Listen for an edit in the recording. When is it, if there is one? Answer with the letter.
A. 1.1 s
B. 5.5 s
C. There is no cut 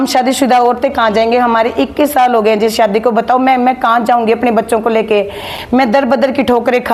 C